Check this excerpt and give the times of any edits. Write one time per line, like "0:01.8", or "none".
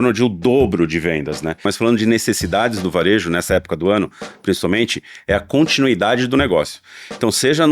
0:01.7